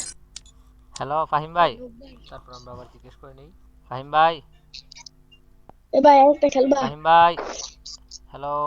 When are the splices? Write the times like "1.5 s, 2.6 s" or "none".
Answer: 1.3 s